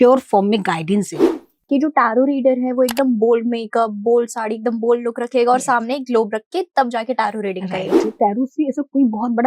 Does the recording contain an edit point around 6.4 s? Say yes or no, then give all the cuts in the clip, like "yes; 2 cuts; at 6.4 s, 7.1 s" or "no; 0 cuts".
no; 2 cuts; at 1.4 s, 8.1 s